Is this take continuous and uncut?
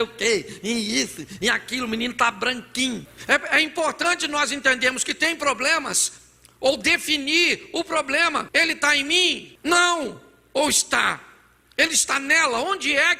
no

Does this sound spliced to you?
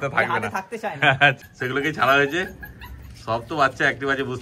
yes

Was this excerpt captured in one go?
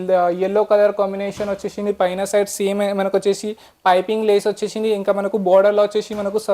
yes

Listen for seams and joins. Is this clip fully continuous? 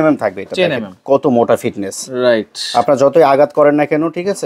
yes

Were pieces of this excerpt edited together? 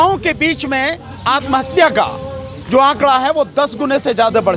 no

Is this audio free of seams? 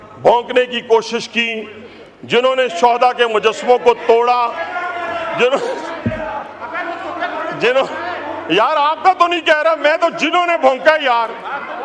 yes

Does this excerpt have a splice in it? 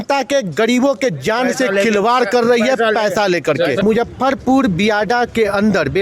yes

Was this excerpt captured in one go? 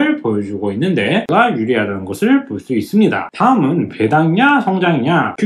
no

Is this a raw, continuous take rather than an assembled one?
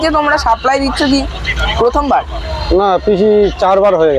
yes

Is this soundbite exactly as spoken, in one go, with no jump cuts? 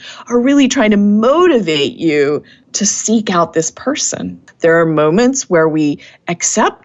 no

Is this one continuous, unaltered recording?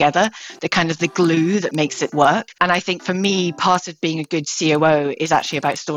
no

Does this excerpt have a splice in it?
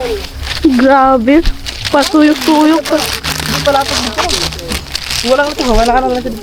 no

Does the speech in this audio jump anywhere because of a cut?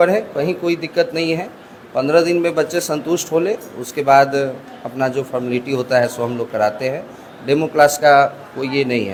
no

